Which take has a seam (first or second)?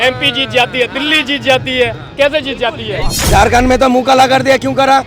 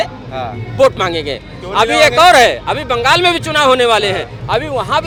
first